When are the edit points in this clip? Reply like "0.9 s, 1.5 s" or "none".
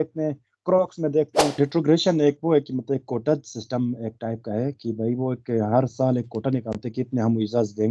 1.5 s